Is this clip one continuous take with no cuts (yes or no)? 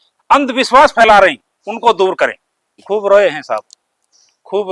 no